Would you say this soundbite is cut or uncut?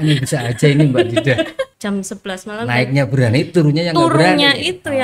cut